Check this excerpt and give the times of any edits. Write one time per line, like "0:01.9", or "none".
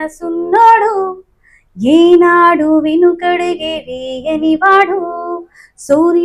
none